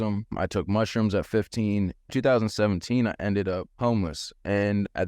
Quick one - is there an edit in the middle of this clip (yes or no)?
yes